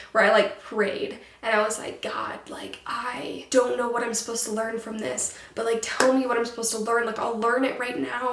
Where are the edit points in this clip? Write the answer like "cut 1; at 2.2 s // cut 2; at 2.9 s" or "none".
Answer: cut 1; at 3.4 s

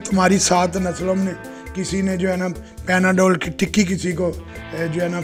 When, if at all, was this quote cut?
none

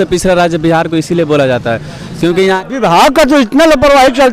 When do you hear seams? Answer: cut 1; at 2.6 s

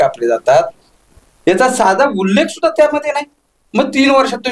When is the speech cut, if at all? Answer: none

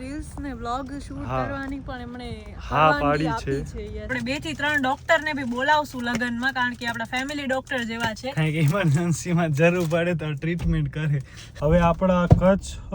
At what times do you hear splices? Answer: cut 1; at 4.1 s // cut 2; at 11.6 s

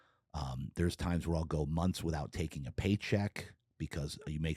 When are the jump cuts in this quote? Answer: none

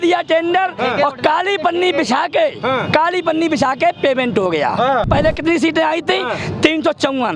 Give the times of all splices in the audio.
cut 1; at 5.1 s

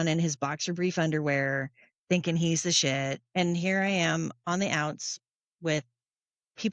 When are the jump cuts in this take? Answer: cut 1; at 3.2 s

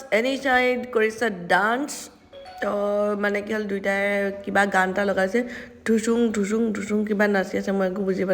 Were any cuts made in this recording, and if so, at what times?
none

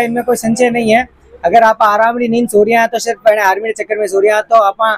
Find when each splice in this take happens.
none

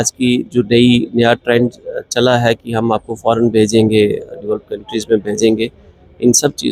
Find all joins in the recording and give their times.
none

